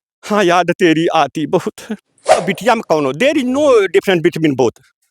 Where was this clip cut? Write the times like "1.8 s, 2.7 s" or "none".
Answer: 2.4 s

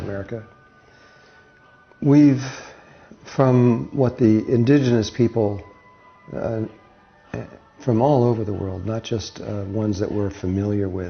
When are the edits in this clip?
5.5 s

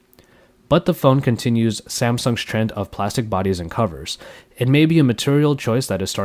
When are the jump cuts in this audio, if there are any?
2.5 s

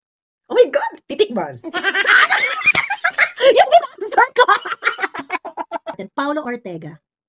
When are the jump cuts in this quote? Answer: 6.0 s

